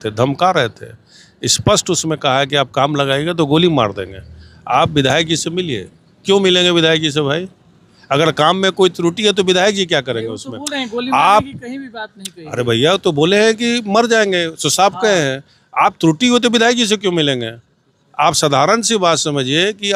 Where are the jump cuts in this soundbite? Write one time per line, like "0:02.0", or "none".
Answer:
none